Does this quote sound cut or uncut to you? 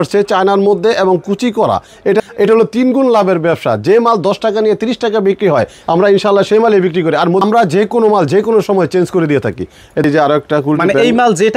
cut